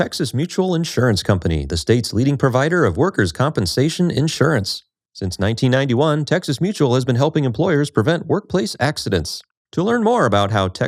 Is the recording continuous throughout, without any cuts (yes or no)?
yes